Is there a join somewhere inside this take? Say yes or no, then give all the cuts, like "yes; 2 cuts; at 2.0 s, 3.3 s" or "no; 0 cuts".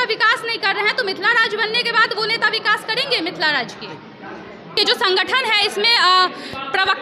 yes; 1 cut; at 4.8 s